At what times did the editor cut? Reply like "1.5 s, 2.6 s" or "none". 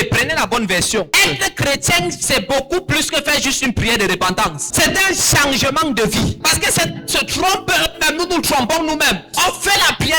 1.2 s, 4.7 s, 6.4 s, 9.3 s